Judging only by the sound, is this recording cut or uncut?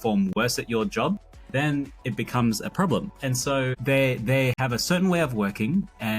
cut